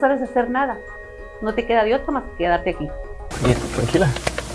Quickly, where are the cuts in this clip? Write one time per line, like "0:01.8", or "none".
0:03.2